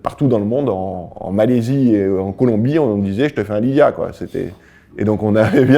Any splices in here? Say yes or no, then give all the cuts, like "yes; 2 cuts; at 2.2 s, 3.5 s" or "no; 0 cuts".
yes; 1 cut; at 1.1 s